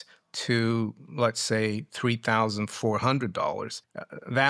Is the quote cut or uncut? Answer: uncut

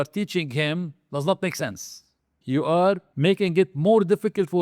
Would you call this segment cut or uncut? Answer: cut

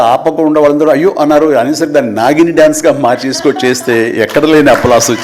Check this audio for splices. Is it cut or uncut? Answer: uncut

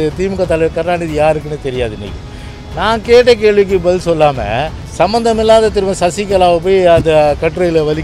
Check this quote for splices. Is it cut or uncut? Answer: cut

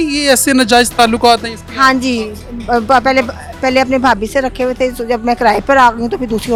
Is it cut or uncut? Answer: uncut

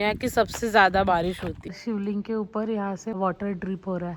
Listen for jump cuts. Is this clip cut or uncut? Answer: cut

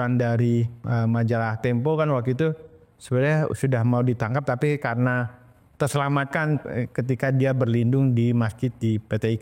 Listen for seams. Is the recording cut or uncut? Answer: uncut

